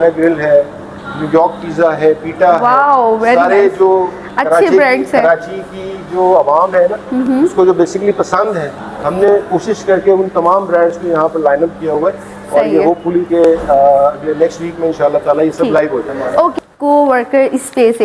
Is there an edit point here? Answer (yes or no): yes